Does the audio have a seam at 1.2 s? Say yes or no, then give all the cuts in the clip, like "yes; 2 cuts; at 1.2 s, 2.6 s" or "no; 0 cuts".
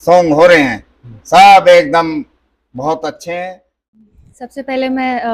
no; 1 cut; at 4.0 s